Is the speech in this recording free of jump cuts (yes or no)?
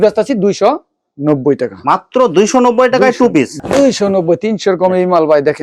no